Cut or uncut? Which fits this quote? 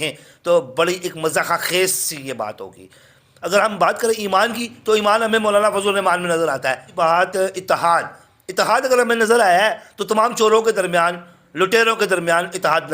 cut